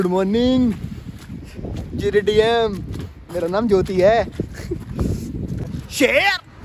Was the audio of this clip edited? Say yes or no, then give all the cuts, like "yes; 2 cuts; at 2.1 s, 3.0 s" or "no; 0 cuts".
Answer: yes; 1 cut; at 5.6 s